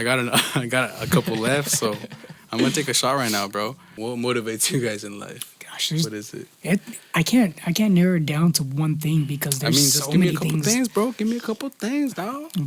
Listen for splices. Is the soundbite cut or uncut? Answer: cut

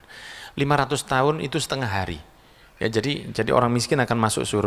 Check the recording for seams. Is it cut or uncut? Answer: uncut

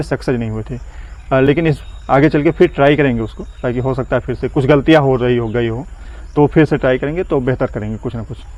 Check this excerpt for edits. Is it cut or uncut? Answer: uncut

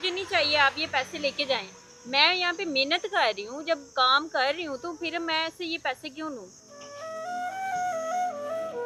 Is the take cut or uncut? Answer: uncut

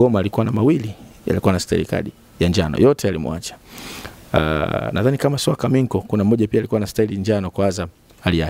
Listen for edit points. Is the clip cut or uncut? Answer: uncut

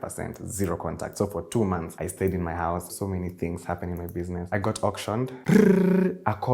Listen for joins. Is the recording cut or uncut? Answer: cut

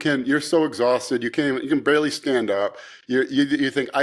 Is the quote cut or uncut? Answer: uncut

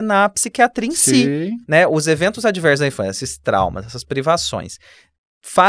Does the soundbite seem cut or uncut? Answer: uncut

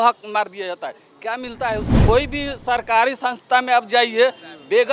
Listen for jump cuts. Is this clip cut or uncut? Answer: cut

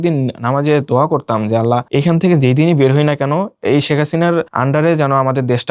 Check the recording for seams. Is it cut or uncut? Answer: cut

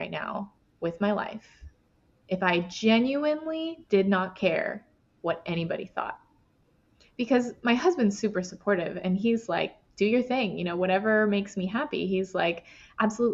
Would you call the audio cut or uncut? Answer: uncut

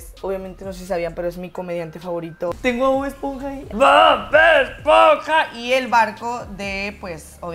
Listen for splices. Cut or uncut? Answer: cut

